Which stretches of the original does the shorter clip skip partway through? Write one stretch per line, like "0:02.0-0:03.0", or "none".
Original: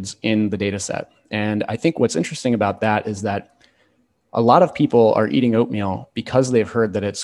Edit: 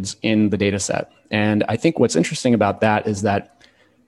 none